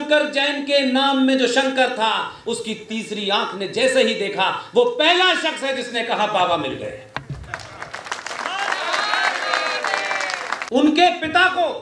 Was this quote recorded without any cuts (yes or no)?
no